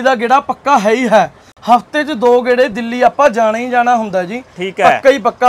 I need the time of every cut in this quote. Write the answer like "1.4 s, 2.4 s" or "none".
none